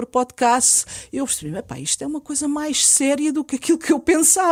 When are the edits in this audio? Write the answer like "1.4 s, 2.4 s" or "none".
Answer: none